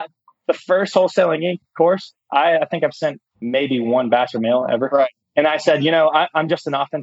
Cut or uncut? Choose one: cut